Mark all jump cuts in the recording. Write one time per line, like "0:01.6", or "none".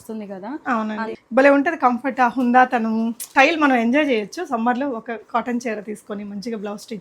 0:01.1
0:03.3